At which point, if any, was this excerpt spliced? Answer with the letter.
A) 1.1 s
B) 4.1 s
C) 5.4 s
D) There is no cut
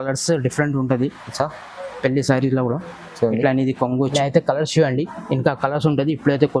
B